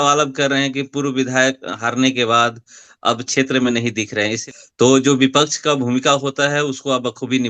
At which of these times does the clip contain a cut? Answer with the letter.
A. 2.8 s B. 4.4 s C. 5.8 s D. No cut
B